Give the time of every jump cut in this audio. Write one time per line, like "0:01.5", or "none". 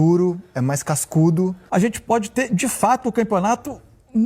0:01.6